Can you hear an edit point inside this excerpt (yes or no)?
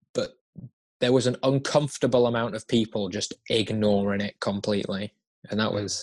no